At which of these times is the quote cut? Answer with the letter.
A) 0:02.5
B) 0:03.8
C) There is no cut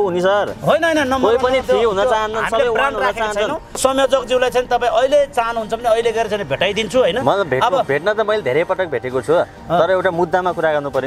B